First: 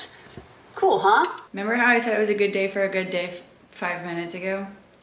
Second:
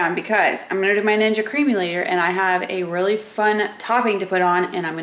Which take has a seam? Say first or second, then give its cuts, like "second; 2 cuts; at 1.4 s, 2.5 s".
first; 1 cut; at 1.4 s